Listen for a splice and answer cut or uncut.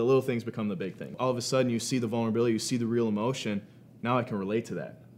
cut